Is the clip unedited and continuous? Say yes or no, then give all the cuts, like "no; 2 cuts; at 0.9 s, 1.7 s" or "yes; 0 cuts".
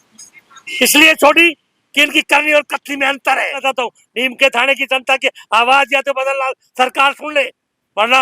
no; 1 cut; at 3.6 s